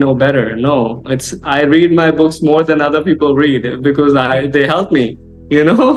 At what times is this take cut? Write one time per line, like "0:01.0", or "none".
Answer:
none